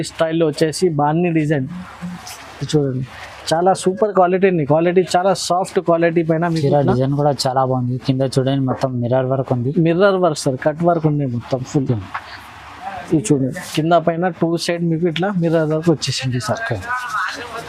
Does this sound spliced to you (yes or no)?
no